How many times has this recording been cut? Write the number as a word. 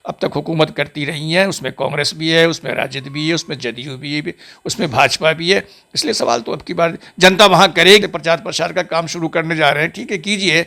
one